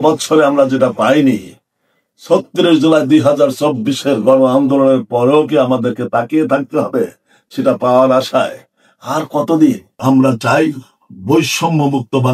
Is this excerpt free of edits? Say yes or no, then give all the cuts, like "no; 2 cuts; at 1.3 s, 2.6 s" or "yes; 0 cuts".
no; 1 cut; at 9.9 s